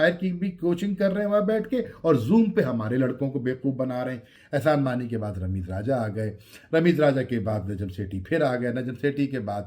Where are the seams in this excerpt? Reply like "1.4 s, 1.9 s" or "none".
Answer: 4.3 s